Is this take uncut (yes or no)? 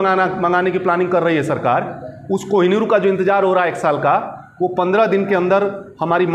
yes